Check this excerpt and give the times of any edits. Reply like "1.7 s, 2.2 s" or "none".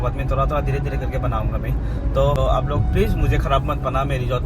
2.4 s